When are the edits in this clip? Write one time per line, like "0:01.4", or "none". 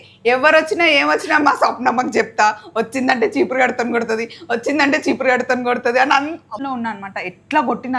0:06.6

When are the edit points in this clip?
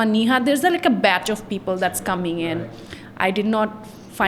none

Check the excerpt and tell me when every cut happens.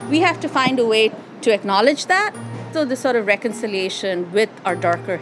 0:01.3
0:02.7

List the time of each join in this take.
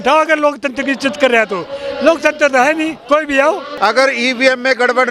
0:03.7

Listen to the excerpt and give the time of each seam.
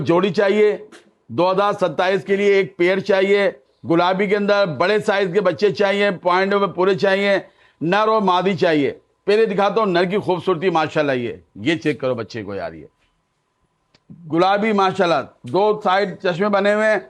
none

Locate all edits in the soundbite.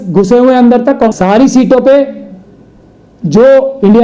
0:01.1

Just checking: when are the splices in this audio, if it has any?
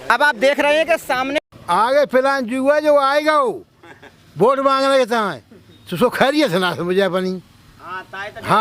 0:01.3

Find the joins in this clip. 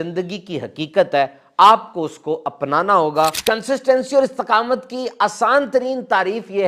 0:03.4

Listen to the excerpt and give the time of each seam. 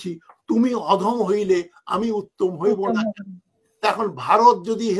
none

